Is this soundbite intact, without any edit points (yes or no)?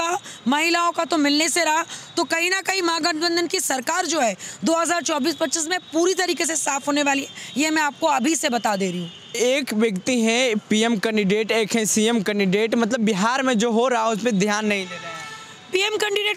yes